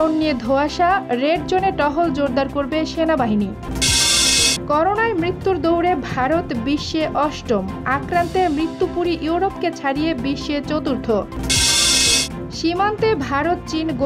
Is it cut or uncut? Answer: uncut